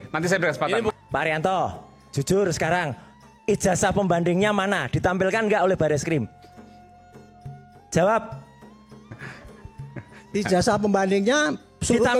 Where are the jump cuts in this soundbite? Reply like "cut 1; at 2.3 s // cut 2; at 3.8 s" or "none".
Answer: cut 1; at 0.9 s